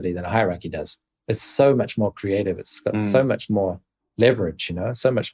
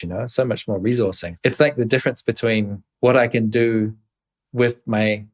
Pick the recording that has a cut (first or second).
second